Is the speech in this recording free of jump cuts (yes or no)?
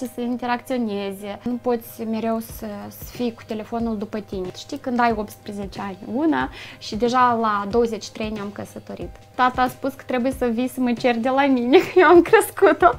no